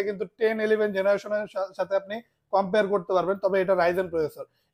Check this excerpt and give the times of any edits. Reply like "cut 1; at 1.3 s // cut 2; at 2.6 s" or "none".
none

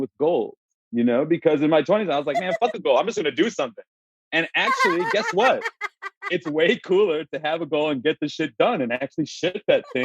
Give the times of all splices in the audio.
none

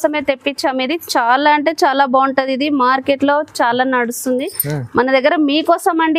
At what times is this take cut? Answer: none

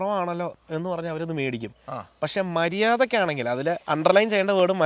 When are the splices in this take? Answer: none

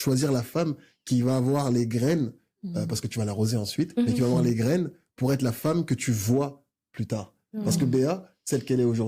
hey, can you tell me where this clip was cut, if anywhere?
none

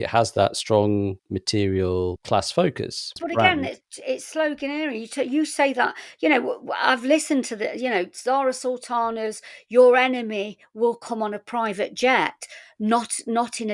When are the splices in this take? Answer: cut 1; at 1.3 s // cut 2; at 2.2 s // cut 3; at 3.2 s

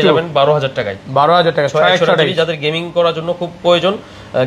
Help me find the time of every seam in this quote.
none

